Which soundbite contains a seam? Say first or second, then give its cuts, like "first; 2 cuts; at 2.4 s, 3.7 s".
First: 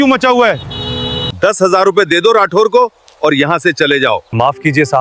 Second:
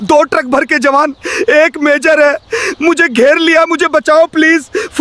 first; 2 cuts; at 1.3 s, 4.2 s